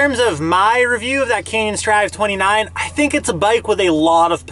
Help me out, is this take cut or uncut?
uncut